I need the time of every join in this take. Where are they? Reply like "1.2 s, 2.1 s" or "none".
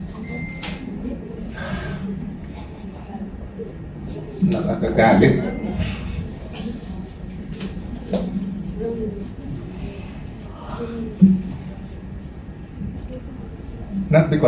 none

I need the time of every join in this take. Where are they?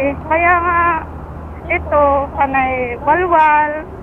none

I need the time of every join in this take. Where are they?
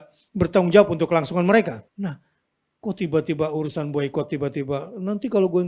1.9 s

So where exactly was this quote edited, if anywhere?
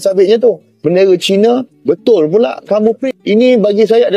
3.0 s

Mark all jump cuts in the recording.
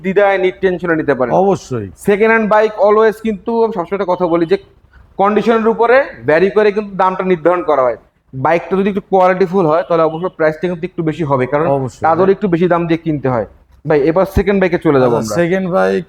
none

